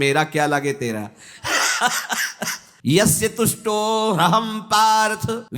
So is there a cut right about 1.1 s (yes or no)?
no